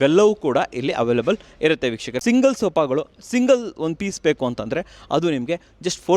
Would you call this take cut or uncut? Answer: cut